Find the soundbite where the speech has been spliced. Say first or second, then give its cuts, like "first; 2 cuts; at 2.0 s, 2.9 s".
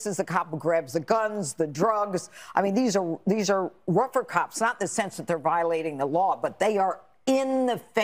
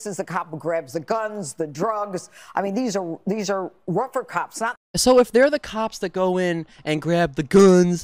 first; 1 cut; at 4.8 s